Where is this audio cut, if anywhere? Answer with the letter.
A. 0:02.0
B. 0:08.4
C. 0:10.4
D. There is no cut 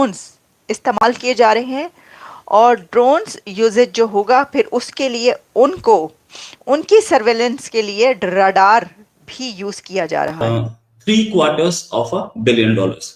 C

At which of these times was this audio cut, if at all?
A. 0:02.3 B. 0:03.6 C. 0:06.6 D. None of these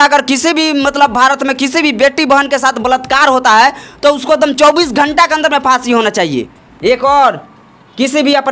C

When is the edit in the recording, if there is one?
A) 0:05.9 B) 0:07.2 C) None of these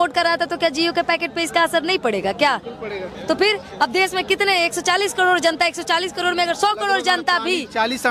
C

